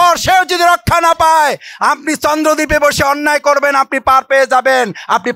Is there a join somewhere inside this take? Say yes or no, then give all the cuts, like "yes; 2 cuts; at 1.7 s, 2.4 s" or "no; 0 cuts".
no; 0 cuts